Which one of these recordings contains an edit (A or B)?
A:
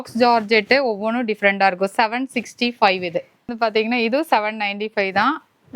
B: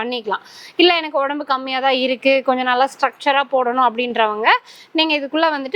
A